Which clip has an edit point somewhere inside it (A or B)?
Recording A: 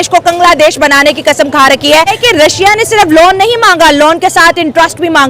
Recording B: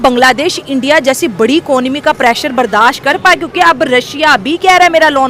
A